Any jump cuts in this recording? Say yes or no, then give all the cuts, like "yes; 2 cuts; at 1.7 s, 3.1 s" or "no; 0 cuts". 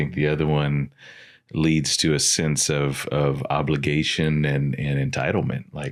no; 0 cuts